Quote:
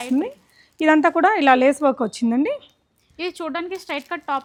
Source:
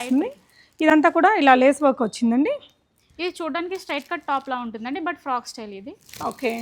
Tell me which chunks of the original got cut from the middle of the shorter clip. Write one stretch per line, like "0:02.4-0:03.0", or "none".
none